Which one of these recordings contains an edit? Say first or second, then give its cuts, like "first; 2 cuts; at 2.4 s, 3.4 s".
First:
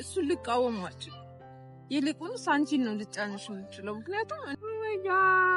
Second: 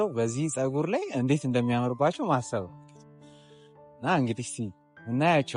first; 1 cut; at 4.5 s